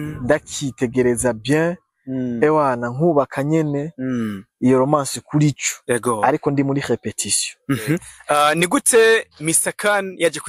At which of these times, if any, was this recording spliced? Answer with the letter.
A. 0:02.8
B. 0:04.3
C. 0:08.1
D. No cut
C